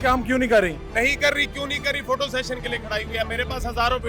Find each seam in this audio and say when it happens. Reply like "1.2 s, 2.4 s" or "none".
none